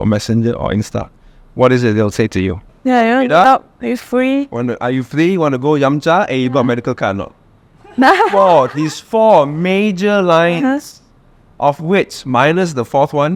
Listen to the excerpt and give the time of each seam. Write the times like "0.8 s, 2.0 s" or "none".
none